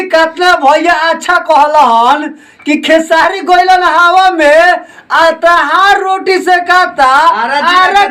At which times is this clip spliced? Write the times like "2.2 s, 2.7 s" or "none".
none